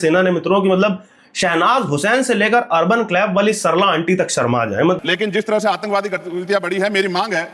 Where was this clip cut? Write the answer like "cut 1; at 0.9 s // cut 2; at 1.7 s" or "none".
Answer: cut 1; at 5.0 s